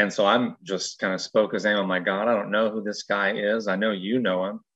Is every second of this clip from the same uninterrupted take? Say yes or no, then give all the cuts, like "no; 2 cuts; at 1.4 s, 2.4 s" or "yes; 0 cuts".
yes; 0 cuts